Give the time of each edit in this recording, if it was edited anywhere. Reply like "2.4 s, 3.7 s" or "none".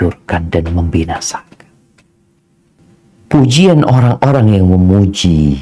2.8 s